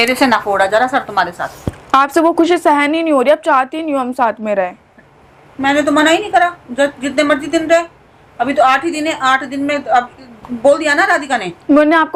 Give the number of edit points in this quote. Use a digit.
0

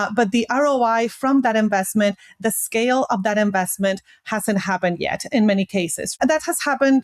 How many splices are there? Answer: 1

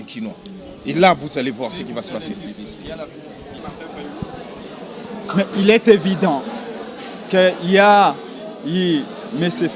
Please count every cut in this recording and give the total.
0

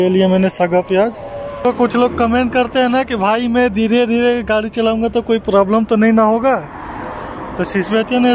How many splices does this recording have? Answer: 1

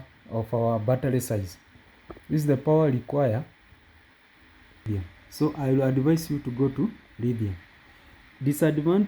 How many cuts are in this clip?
1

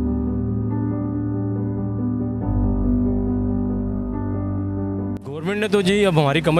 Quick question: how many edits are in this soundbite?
0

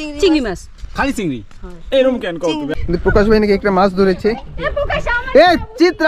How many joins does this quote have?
1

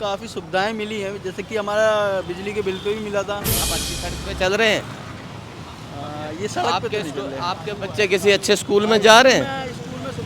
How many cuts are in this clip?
1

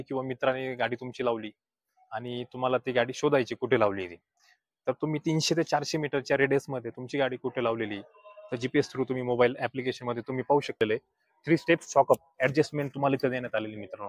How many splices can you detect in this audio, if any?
1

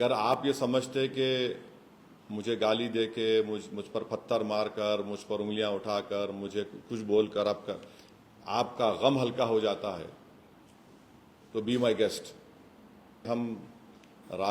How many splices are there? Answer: 1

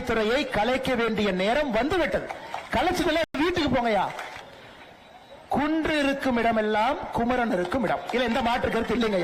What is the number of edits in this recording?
1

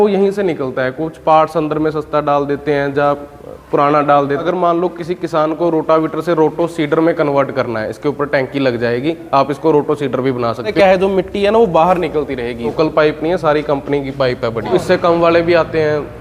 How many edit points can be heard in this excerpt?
4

